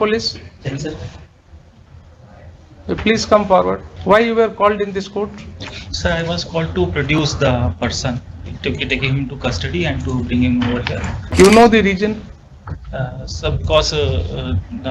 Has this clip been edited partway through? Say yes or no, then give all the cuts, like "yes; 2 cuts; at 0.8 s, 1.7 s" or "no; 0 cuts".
yes; 2 cuts; at 3.9 s, 11.2 s